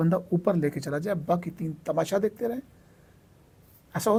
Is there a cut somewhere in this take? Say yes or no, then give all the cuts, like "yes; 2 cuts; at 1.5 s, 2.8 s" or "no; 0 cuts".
no; 0 cuts